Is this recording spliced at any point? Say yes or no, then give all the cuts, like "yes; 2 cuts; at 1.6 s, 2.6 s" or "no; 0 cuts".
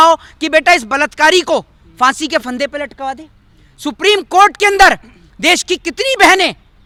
no; 0 cuts